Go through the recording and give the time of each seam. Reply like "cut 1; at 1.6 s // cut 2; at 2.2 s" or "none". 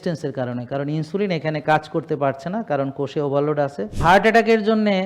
cut 1; at 3.9 s